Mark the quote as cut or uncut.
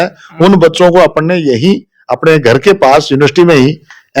uncut